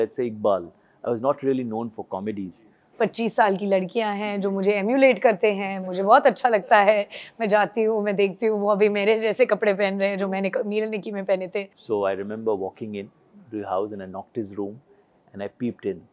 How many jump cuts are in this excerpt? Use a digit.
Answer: 2